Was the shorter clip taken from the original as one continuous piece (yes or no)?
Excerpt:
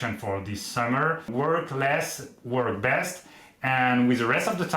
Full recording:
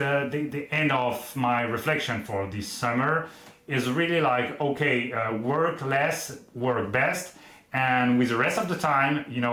no